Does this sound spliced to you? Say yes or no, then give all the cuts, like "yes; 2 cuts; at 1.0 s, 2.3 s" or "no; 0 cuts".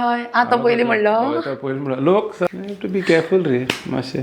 yes; 1 cut; at 2.5 s